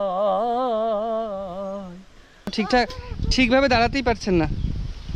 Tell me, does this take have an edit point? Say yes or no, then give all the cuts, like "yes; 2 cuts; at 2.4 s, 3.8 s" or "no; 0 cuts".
yes; 1 cut; at 2.5 s